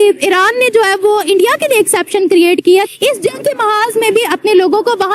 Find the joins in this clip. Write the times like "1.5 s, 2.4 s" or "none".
2.9 s